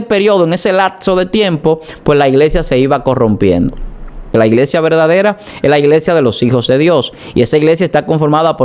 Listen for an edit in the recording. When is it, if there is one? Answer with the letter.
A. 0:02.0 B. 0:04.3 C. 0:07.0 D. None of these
B